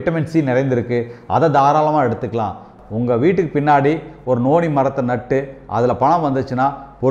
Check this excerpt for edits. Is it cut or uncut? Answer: cut